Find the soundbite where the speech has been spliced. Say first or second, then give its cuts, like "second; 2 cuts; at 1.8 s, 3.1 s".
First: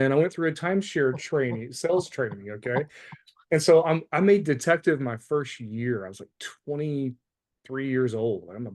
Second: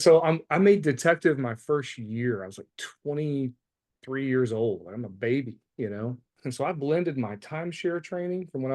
second; 1 cut; at 6.3 s